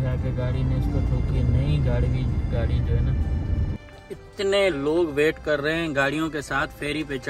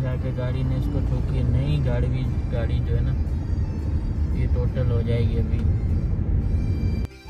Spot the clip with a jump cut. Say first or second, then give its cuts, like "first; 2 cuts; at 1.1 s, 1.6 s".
first; 1 cut; at 3.8 s